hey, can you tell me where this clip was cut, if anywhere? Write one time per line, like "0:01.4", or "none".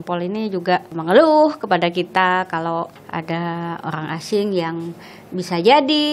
0:00.9
0:03.0